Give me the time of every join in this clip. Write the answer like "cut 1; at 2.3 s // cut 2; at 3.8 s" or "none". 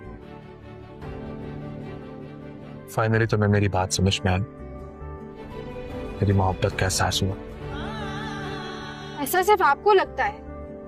none